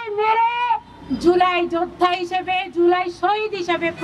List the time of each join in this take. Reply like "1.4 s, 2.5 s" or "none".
none